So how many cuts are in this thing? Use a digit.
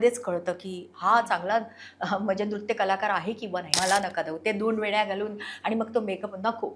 1